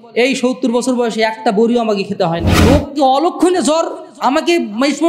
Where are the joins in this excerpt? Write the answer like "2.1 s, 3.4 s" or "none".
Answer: 2.6 s